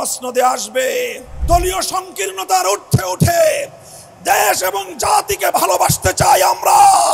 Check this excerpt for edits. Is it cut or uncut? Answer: cut